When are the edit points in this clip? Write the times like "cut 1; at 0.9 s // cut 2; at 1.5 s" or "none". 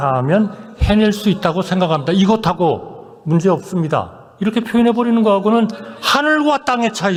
none